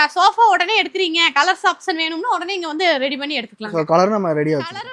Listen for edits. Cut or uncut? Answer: uncut